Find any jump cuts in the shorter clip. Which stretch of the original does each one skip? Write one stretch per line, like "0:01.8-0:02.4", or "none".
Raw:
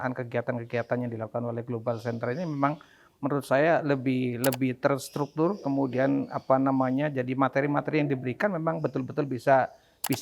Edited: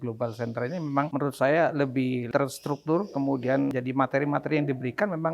0:02.8-0:03.2
0:04.4-0:04.8
0:06.3-0:07.2